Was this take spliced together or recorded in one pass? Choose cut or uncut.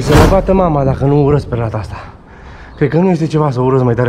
uncut